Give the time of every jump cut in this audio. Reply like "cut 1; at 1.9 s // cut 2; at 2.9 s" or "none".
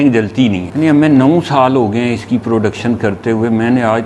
none

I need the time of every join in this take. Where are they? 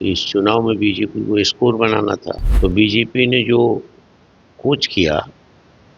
cut 1; at 2.4 s

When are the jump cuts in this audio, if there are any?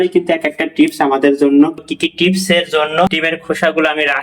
cut 1; at 1.8 s // cut 2; at 3.1 s

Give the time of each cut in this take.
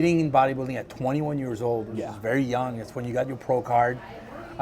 none

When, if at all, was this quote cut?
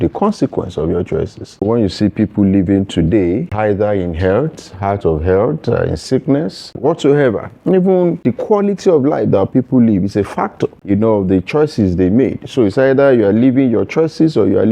cut 1; at 1.6 s // cut 2; at 3.5 s // cut 3; at 6.8 s // cut 4; at 8.2 s // cut 5; at 10.8 s

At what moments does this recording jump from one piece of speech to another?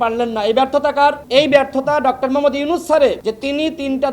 cut 1; at 1.2 s // cut 2; at 3.2 s

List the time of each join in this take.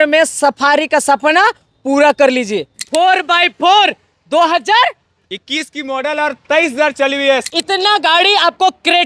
cut 1; at 2.7 s // cut 2; at 7.4 s

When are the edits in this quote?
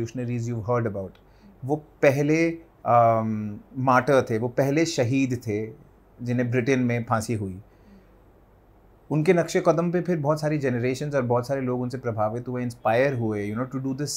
none

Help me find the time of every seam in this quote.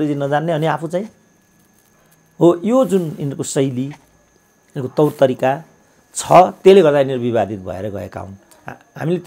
none

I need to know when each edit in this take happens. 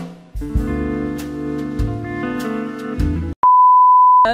cut 1; at 3.4 s

